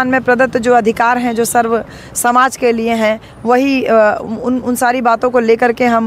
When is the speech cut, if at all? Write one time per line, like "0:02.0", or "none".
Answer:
none